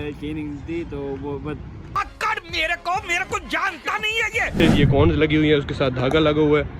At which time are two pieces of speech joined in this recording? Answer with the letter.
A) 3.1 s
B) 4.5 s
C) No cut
B